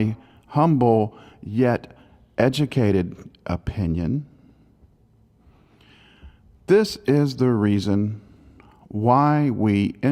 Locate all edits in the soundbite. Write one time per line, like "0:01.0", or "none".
0:04.0

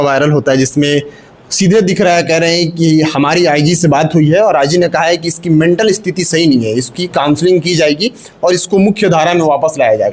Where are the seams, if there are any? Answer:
none

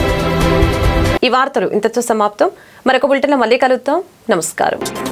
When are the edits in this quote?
none

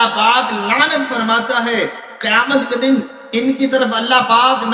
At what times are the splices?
none

